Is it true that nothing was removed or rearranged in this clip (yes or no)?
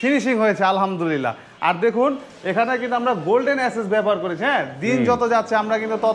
yes